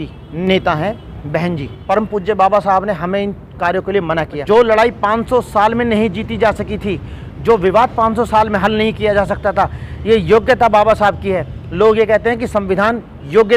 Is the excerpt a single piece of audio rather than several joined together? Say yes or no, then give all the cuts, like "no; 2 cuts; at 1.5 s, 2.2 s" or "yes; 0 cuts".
no; 2 cuts; at 1.7 s, 4.4 s